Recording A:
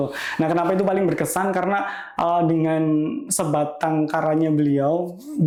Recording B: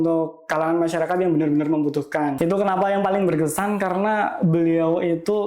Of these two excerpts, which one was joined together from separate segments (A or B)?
B